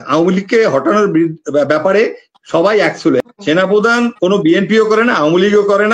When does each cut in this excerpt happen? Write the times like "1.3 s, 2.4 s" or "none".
3.2 s